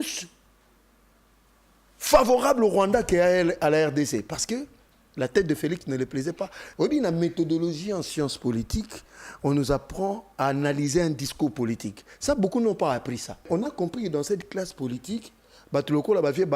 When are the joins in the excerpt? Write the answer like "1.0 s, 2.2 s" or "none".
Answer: 6.6 s, 13.5 s